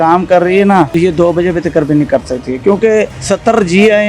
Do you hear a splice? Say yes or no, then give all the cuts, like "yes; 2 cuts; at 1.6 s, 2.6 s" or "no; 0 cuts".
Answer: yes; 2 cuts; at 0.9 s, 3.2 s